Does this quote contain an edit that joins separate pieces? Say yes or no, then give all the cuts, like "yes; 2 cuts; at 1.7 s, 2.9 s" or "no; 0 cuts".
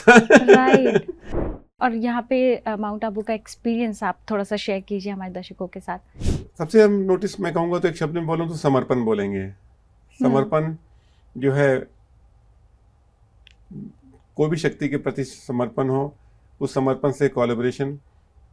yes; 2 cuts; at 1.4 s, 6.1 s